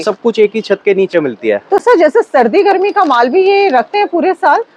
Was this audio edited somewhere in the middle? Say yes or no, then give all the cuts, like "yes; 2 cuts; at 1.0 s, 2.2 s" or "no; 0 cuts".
no; 0 cuts